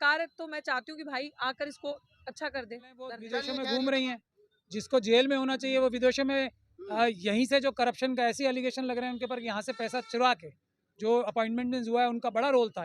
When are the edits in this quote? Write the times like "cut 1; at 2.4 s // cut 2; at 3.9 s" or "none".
cut 1; at 3.2 s